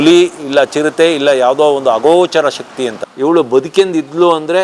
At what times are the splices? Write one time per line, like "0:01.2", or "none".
0:03.0

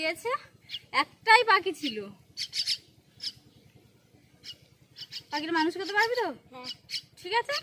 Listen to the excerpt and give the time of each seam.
none

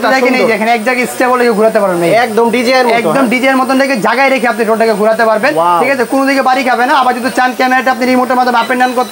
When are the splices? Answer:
none

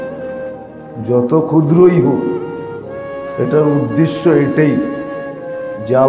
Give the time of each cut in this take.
none

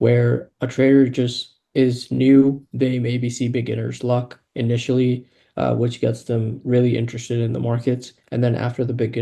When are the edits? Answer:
none

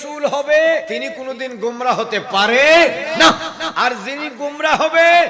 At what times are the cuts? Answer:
0:01.0

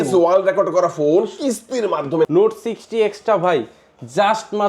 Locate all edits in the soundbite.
0:02.3

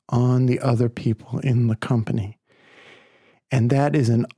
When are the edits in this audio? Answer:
none

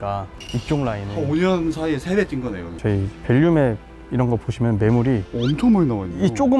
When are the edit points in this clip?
0:02.7

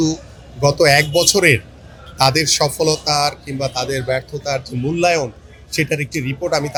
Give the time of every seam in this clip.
none

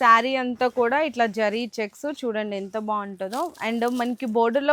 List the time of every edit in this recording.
none

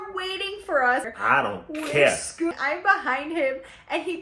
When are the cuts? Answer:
0:01.0
0:02.5

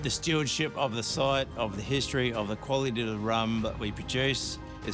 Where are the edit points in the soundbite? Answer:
none

